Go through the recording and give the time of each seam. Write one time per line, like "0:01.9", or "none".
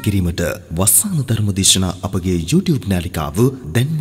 none